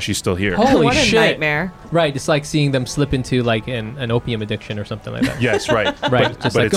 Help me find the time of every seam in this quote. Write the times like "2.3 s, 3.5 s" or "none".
1.8 s